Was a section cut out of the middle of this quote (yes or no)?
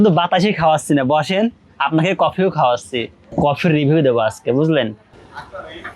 yes